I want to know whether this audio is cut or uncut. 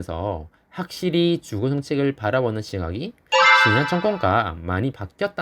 uncut